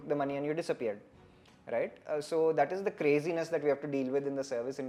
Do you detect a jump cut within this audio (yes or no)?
no